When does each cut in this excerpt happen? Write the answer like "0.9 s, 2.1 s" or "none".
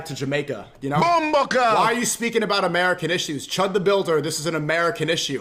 none